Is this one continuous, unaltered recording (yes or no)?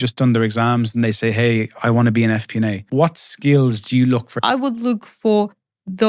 no